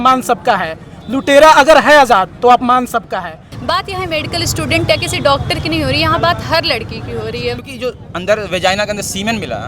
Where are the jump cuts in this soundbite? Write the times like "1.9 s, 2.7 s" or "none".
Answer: 3.5 s, 7.7 s